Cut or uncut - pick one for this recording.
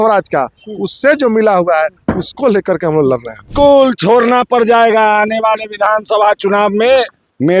cut